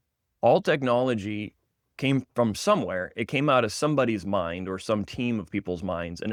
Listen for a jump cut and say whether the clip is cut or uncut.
uncut